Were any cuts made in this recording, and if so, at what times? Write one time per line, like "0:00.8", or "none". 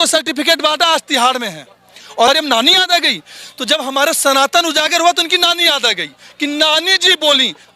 0:02.3

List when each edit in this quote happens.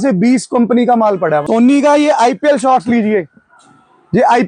0:01.4

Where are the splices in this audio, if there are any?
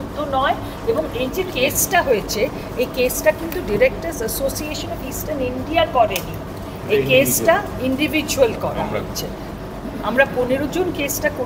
none

